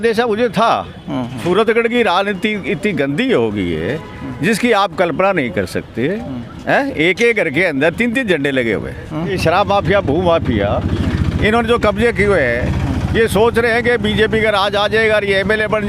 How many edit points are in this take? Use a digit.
2